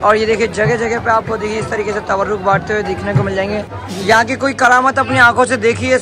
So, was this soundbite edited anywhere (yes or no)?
yes